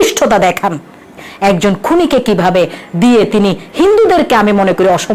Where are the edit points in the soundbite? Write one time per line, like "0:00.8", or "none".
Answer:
0:01.1